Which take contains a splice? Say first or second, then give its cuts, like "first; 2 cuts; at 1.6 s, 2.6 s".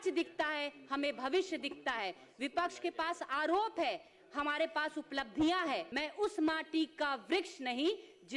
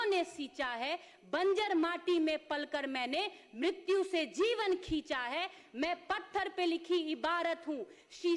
first; 1 cut; at 5.9 s